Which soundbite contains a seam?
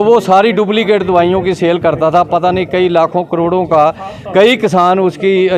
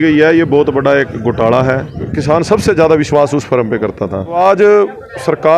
second; 2 cuts; at 2.1 s, 4.3 s

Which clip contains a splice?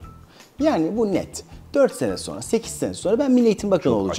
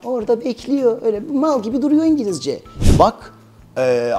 second; 1 cut; at 2.8 s

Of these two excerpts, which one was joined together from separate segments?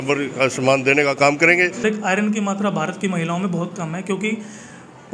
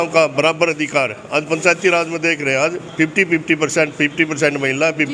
first; 1 cut; at 1.8 s

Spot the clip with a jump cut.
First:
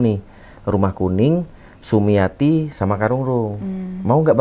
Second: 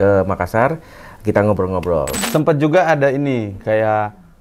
second; 1 cut; at 2.2 s

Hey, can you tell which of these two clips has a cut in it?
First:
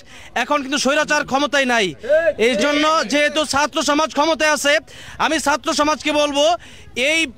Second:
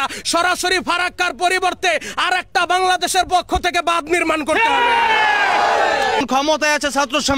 second; 1 cut; at 6.2 s

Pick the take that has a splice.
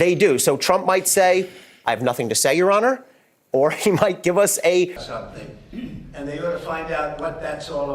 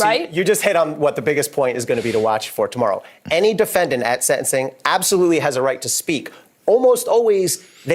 first; 1 cut; at 5.0 s

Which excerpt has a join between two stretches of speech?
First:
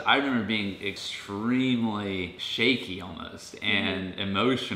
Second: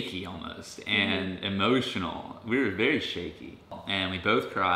first; 1 cut; at 0.9 s

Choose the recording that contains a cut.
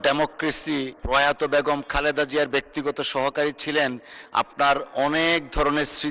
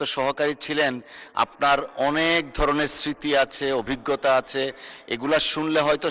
first; 1 cut; at 0.9 s

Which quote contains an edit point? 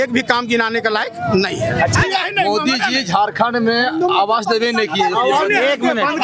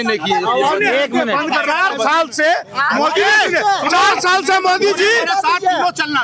first; 1 cut; at 1.9 s

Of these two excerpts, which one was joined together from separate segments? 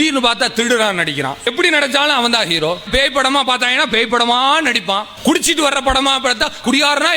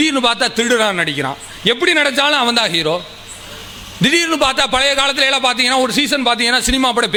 first; 3 cuts; at 1.4 s, 2.9 s, 5.1 s

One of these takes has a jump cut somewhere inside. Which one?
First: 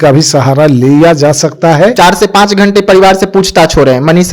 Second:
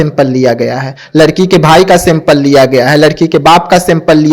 first; 1 cut; at 1.9 s

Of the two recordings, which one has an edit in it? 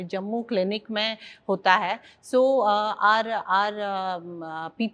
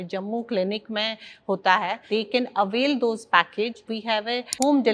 second; 2 cuts; at 2.0 s, 4.0 s

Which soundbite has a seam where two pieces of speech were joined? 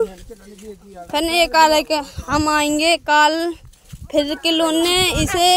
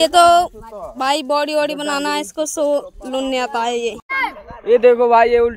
second; 1 cut; at 4.1 s

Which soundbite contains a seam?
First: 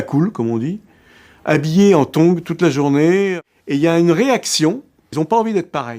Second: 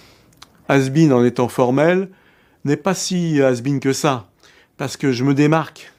first; 2 cuts; at 3.3 s, 5.1 s

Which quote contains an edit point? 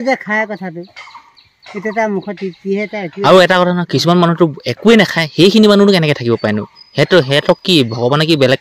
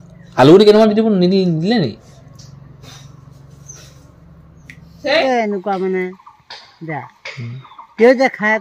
second; 1 cut; at 5.2 s

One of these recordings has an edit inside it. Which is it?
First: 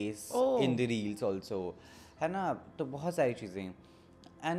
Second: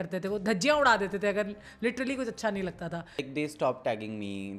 second; 1 cut; at 3.3 s

